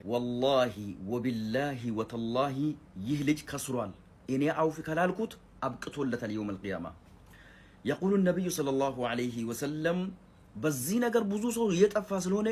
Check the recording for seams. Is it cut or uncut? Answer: uncut